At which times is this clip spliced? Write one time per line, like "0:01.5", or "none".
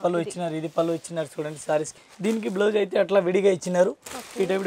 0:01.9